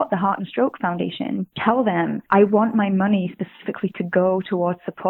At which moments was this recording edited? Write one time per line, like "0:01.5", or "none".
0:01.5
0:02.2